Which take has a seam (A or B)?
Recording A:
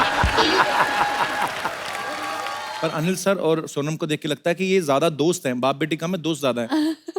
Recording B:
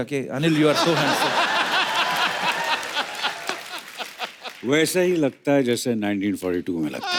A